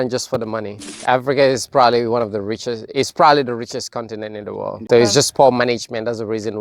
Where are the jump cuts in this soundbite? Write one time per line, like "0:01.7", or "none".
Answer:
0:01.0
0:04.8